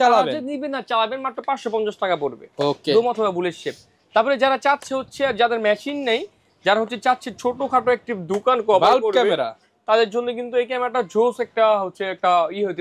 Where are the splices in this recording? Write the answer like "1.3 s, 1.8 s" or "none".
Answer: none